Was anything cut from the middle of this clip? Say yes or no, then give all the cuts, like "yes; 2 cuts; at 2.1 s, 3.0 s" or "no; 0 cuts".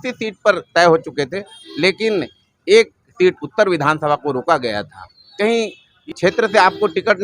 yes; 1 cut; at 6.1 s